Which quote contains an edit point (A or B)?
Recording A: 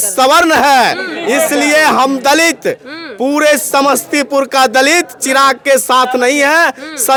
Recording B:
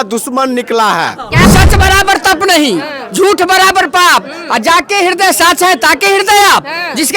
B